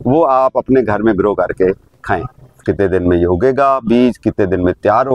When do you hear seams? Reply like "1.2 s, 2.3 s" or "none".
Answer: 2.6 s